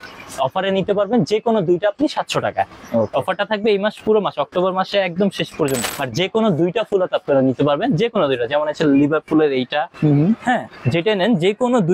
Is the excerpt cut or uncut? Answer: cut